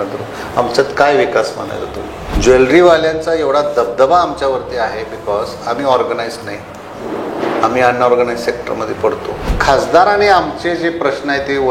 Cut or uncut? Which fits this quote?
cut